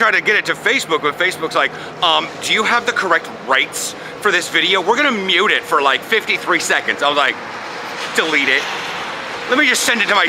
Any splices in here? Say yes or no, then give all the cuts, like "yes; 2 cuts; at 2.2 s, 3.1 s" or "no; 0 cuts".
no; 0 cuts